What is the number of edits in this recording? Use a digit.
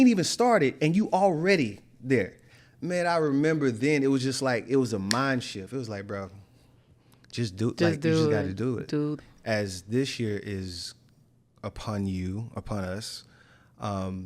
1